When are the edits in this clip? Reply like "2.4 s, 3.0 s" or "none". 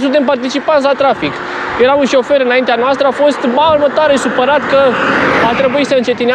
none